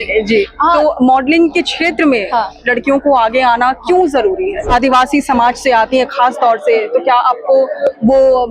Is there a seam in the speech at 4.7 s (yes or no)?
yes